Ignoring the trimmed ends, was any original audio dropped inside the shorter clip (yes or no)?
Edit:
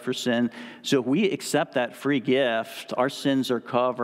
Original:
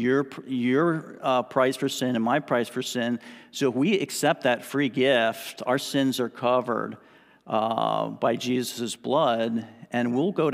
no